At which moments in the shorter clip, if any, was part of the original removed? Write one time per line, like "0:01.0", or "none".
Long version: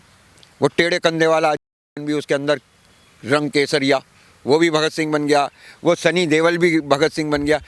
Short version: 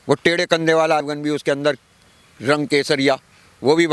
0:01.1